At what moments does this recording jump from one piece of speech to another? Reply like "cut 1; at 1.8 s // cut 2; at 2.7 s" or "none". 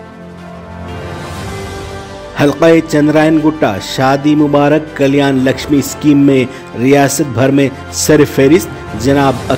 cut 1; at 2.1 s